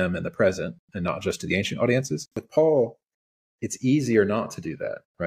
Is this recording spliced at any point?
yes; 1 cut; at 2.4 s

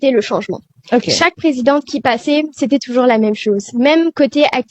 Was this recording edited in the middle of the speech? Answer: no; 0 cuts

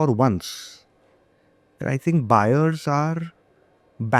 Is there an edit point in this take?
no; 0 cuts

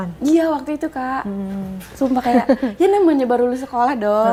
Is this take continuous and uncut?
yes; 0 cuts

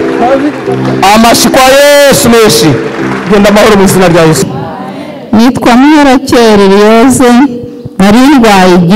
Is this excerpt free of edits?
no; 1 cut; at 4.5 s

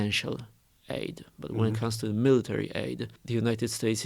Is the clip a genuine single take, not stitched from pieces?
no; 1 cut; at 3.1 s

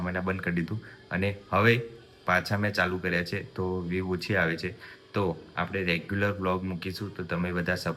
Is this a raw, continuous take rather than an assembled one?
yes; 0 cuts

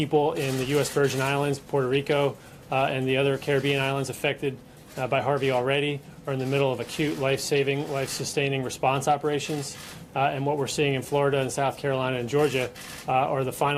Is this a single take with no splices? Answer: yes; 0 cuts

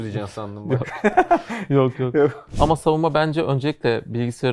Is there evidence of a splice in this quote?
yes; 1 cut; at 2.4 s

